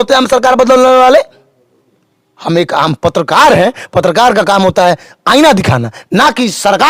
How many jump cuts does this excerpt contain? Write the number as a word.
zero